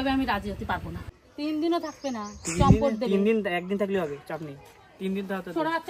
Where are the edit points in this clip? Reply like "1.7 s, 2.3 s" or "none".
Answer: 0.9 s, 4.9 s

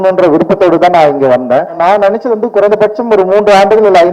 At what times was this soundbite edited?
1.8 s

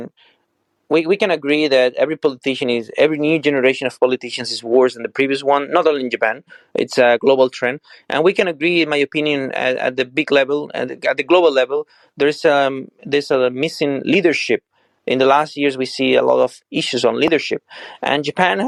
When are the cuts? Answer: none

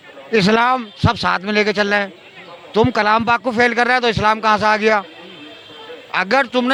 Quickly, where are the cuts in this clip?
none

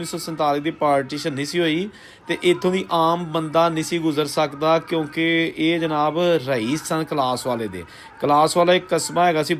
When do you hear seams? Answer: none

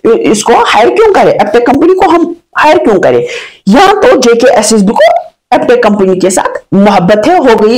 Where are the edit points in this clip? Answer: none

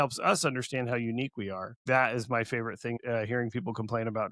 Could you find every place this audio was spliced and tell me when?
1.8 s, 3.0 s

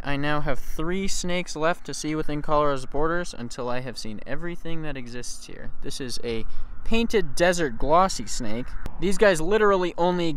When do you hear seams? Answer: none

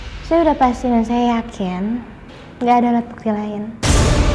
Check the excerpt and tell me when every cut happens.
none

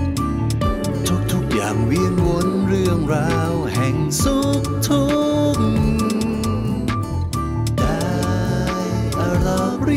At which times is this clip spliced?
none

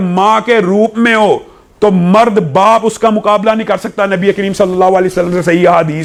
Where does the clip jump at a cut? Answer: none

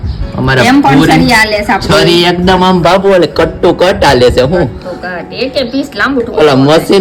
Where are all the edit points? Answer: none

